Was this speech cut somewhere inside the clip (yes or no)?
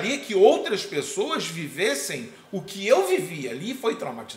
no